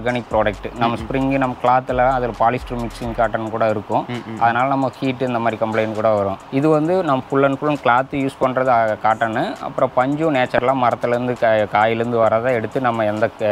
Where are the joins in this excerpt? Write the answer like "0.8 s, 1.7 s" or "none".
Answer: none